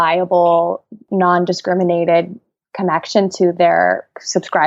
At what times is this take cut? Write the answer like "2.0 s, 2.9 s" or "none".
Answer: 1.0 s